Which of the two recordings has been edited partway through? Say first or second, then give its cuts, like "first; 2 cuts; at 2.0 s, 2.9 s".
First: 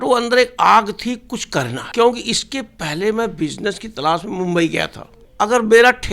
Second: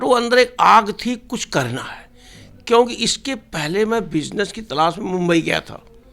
first; 2 cuts; at 1.8 s, 5.2 s